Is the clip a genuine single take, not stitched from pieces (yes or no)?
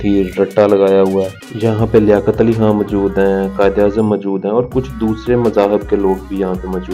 yes